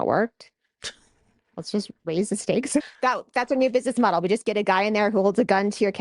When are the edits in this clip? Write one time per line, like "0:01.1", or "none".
0:02.8

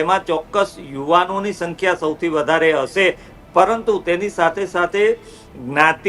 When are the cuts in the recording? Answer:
none

